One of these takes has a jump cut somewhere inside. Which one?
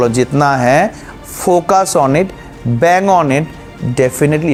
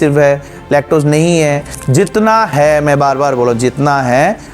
second; 1 cut; at 1.7 s

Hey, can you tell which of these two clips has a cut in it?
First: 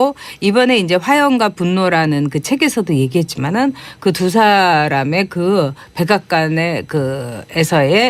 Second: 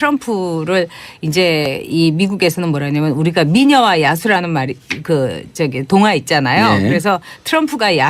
first; 1 cut; at 7.1 s

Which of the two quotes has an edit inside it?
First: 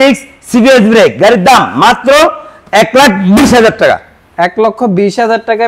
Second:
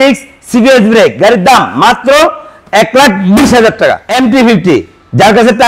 second; 1 cut; at 4.1 s

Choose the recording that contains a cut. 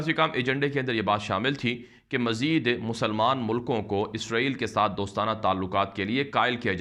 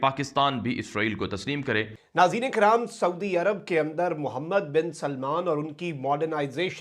second; 1 cut; at 2.0 s

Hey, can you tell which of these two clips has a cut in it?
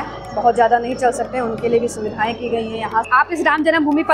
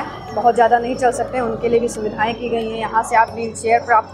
first; 1 cut; at 3.1 s

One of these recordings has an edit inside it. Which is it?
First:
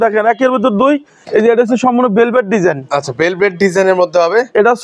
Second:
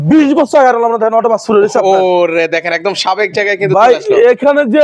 first; 1 cut; at 1.2 s

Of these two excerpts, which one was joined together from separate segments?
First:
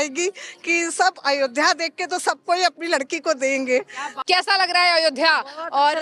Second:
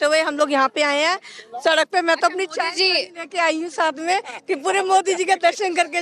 first; 1 cut; at 4.2 s

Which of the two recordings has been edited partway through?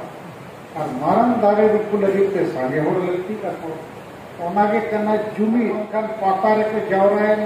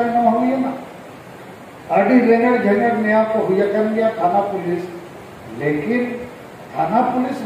first; 1 cut; at 5.9 s

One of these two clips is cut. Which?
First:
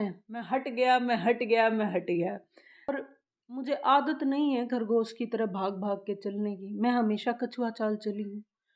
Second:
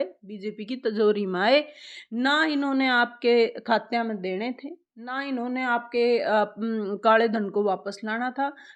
first; 1 cut; at 2.9 s

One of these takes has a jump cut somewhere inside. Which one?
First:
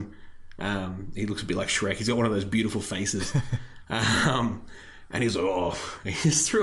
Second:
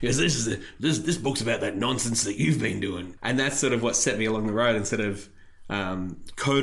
second; 1 cut; at 3.1 s

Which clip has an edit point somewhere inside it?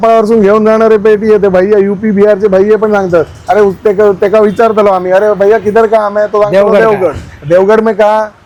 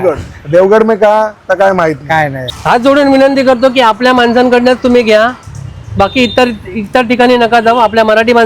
second; 1 cut; at 2.5 s

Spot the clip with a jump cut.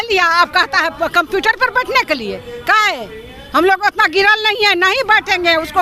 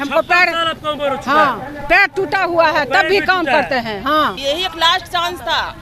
second; 1 cut; at 4.4 s

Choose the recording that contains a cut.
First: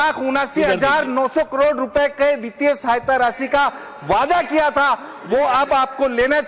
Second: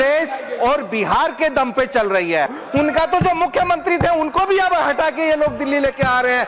second; 1 cut; at 2.6 s

